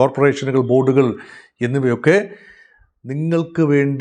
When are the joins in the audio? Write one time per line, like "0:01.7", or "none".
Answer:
none